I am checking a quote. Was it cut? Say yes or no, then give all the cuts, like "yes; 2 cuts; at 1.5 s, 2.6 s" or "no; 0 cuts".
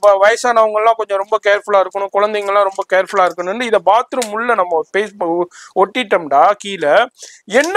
no; 0 cuts